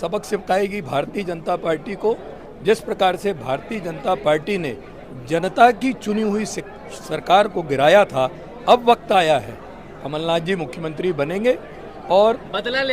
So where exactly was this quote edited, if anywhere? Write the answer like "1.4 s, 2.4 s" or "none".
none